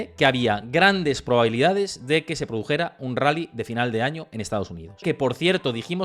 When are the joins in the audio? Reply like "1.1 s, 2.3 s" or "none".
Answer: 5.0 s